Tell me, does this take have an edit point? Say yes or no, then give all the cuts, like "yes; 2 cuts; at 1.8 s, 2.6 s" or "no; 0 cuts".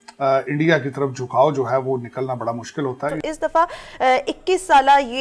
yes; 1 cut; at 3.2 s